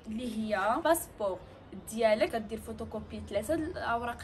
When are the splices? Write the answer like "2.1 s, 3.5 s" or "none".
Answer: 0.8 s, 2.3 s